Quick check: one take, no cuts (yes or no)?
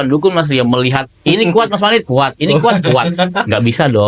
yes